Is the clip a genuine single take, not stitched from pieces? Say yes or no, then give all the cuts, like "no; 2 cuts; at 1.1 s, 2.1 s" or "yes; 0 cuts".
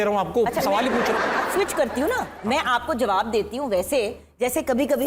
yes; 0 cuts